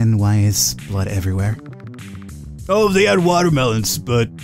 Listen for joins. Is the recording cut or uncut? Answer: uncut